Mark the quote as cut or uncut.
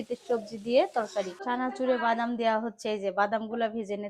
cut